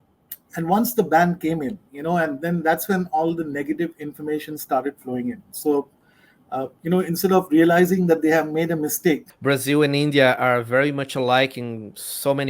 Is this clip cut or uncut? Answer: cut